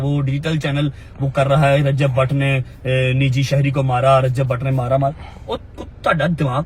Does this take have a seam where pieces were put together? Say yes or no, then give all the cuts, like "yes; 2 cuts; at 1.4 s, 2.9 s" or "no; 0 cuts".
no; 0 cuts